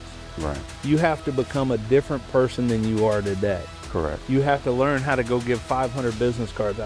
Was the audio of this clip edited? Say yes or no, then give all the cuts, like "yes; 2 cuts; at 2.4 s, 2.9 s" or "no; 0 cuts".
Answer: no; 0 cuts